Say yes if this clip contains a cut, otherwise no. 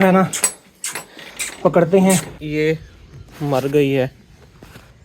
yes